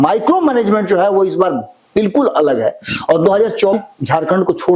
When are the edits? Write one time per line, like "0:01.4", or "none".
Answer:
0:03.7

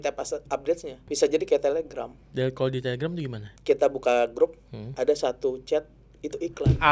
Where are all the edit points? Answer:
0:01.0
0:02.2
0:03.4

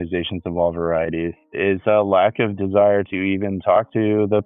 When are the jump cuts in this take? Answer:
0:01.5

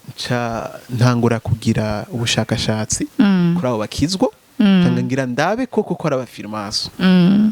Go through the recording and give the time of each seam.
none

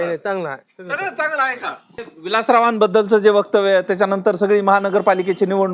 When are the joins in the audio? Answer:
0:02.1

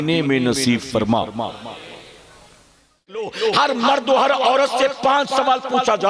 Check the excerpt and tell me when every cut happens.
0:03.3

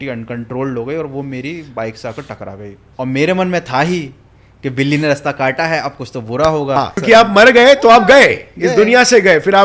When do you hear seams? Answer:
0:06.8

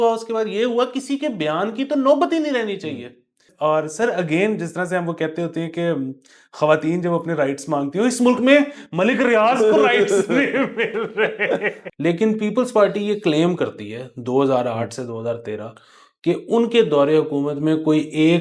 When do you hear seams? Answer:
0:03.4
0:11.8

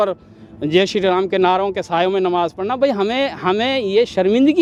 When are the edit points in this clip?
none

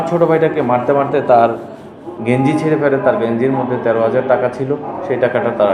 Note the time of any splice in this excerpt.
none

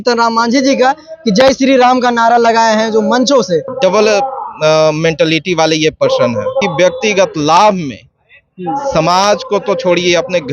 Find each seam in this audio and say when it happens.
0:03.7
0:06.6

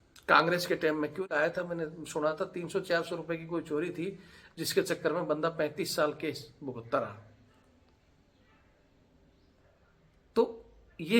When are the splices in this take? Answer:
0:01.2

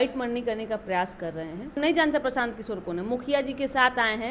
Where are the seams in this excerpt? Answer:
0:01.8

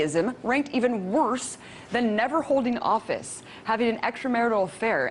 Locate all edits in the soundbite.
none

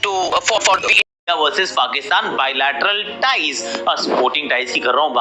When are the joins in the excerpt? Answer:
0:01.0

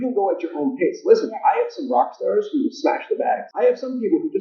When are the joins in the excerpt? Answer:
0:03.5

